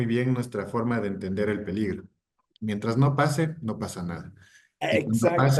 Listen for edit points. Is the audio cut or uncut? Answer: uncut